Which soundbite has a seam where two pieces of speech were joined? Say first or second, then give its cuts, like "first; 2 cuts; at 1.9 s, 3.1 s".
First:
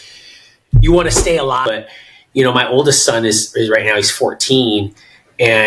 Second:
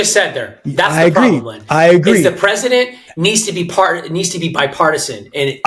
first; 1 cut; at 1.6 s